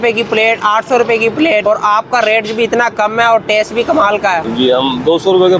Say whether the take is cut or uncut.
cut